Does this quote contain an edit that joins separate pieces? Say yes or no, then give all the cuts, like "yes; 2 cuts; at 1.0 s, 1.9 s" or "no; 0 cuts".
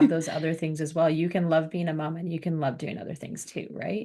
no; 0 cuts